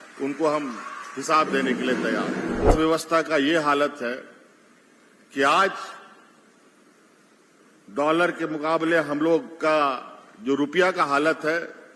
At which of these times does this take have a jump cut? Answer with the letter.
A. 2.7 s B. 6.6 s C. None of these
A